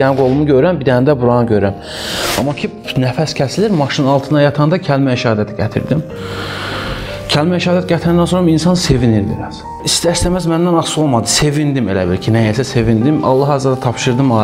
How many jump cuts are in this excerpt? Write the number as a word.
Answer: zero